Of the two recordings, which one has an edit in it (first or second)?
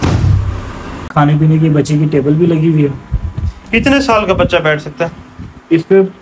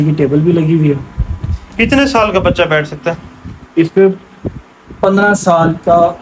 first